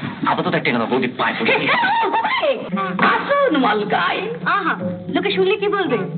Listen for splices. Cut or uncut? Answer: cut